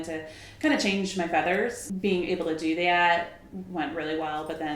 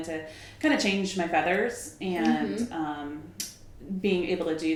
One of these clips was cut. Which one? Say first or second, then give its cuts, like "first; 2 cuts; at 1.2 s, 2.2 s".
first; 1 cut; at 1.9 s